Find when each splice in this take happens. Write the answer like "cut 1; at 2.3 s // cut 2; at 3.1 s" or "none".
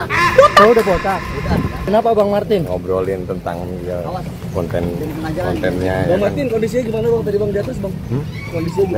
none